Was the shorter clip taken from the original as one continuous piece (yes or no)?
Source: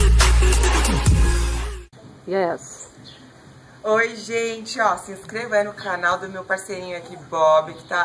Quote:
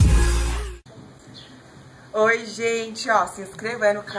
no